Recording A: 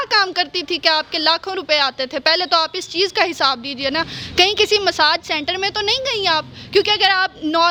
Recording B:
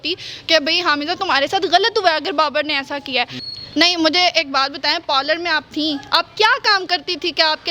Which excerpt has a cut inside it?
B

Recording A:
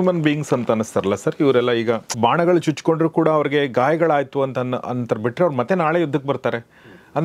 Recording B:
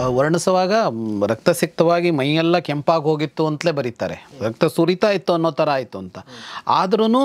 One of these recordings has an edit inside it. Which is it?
A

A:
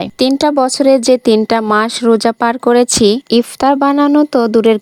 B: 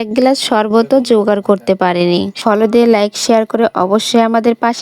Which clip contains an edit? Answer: B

